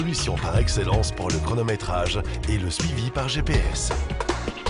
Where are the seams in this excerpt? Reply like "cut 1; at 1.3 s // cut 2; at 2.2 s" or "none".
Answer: none